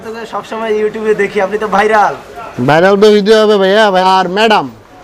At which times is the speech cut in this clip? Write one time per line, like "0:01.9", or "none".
0:04.0